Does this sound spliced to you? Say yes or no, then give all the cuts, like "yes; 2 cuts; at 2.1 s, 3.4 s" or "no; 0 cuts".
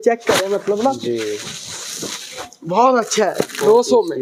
no; 0 cuts